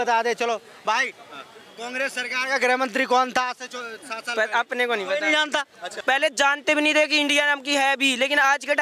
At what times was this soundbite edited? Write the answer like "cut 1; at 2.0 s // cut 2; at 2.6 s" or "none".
cut 1; at 5.9 s